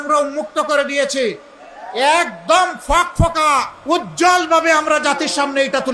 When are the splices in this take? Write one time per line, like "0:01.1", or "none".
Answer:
0:03.7